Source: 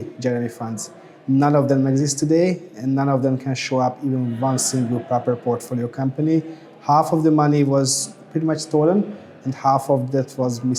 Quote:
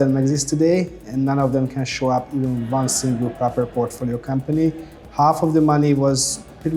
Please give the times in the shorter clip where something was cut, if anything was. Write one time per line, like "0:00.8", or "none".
none